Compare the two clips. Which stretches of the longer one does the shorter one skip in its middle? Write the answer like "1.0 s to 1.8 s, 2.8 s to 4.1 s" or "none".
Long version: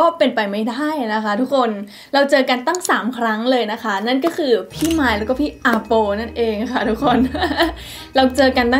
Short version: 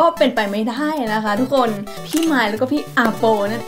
2.0 s to 4.7 s